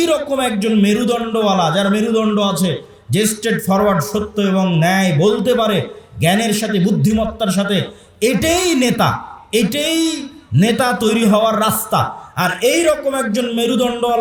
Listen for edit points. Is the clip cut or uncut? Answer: uncut